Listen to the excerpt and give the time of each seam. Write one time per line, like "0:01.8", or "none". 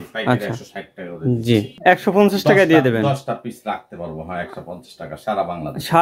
0:01.7